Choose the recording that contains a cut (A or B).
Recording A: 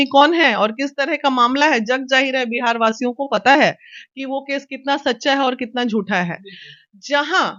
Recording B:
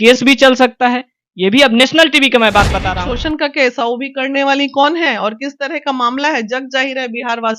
B